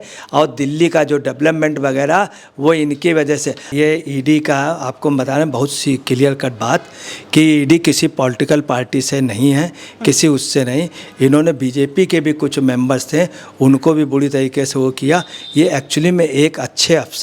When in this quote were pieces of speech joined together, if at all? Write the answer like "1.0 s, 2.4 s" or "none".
3.7 s